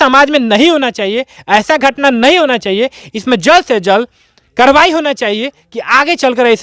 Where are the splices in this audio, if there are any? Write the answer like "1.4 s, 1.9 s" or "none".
none